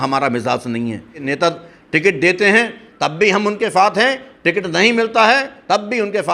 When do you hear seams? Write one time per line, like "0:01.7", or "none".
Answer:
0:01.3